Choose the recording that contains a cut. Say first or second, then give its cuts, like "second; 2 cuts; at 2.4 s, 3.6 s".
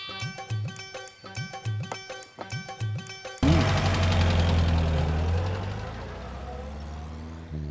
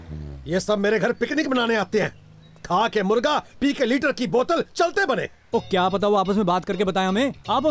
first; 1 cut; at 3.4 s